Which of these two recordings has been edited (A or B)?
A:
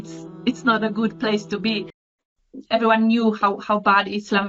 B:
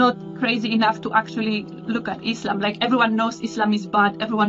A